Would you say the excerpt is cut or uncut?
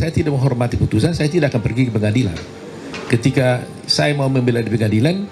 uncut